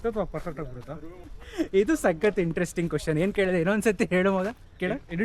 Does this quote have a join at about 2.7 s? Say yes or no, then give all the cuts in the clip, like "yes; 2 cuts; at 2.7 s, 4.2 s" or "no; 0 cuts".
no; 1 cut; at 1.3 s